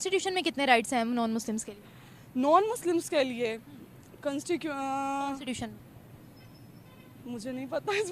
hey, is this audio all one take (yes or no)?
yes